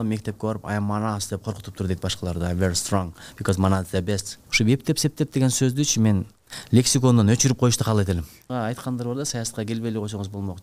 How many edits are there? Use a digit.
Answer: 2